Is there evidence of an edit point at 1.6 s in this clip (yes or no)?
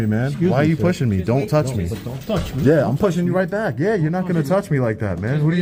no